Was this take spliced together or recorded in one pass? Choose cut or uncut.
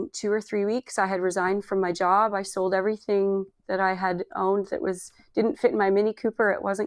uncut